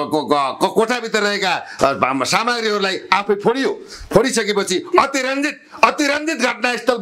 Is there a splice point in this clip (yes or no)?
no